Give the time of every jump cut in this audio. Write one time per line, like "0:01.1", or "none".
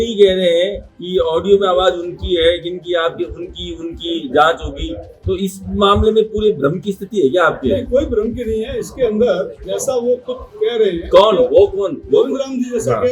none